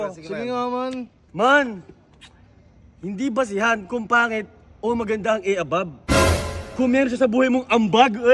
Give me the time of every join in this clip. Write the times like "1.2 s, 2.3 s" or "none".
none